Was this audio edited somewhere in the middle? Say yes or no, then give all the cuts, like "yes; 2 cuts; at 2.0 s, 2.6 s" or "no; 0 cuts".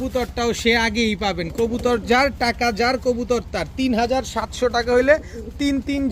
no; 0 cuts